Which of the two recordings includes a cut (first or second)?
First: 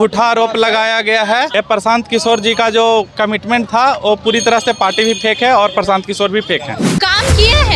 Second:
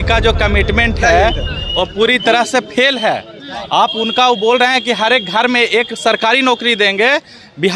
first